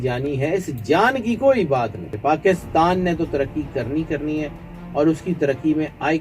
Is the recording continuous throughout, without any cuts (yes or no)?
no